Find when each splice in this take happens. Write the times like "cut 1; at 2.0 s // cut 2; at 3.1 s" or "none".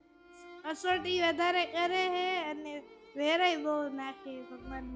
none